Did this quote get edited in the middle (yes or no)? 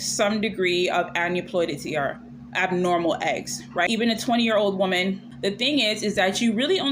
yes